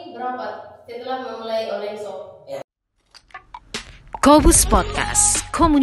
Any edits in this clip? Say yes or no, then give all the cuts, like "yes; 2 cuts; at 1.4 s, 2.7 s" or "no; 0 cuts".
yes; 1 cut; at 2.7 s